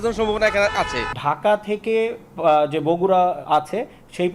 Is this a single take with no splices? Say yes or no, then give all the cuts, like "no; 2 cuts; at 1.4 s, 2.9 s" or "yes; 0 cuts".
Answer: no; 1 cut; at 1.0 s